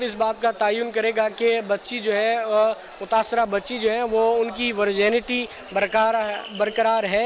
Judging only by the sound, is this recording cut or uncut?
uncut